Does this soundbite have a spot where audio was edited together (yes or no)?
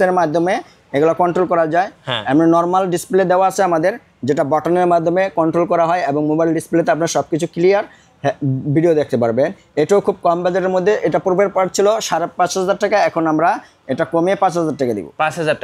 no